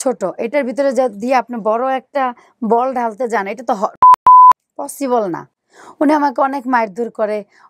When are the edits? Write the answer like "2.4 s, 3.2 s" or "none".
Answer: none